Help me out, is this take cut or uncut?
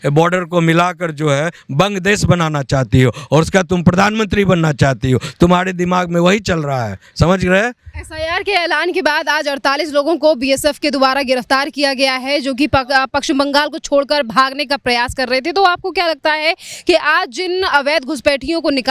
uncut